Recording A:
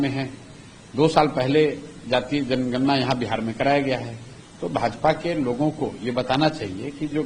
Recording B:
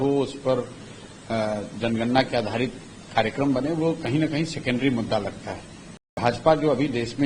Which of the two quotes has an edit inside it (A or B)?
B